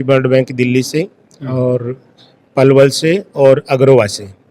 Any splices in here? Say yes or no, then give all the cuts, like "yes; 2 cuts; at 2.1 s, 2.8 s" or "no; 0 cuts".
no; 0 cuts